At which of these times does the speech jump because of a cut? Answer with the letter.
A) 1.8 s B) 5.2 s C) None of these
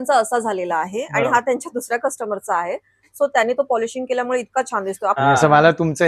B